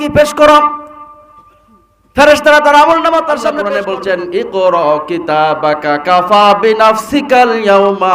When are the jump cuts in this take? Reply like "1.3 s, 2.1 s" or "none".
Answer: 3.6 s